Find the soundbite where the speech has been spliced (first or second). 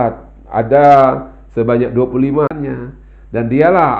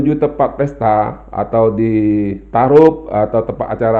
first